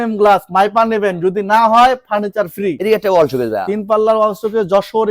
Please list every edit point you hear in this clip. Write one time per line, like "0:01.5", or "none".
0:02.8